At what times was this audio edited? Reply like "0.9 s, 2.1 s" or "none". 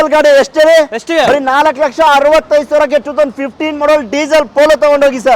none

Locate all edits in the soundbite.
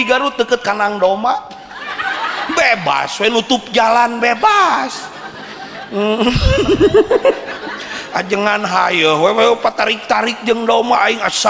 none

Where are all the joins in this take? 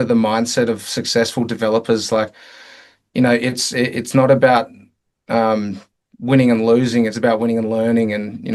none

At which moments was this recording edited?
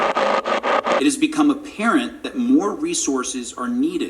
1.0 s

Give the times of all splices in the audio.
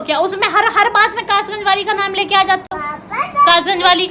none

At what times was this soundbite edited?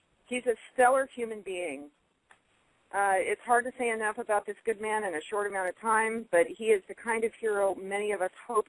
2.1 s

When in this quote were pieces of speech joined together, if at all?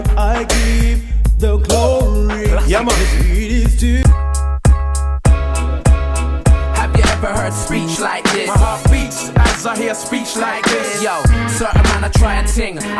4.0 s

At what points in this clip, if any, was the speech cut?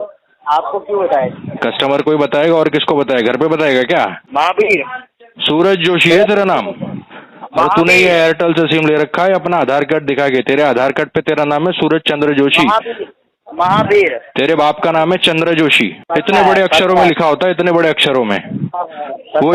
4.2 s, 15.9 s

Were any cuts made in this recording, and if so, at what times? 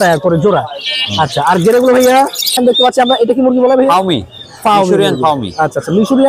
2.6 s

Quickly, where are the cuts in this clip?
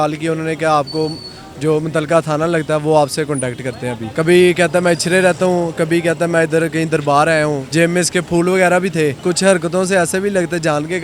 4.0 s, 7.6 s, 9.2 s

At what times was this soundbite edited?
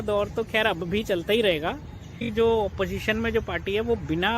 2.2 s

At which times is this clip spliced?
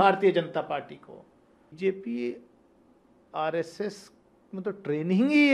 1.8 s

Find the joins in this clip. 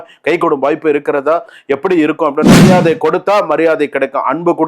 2.6 s

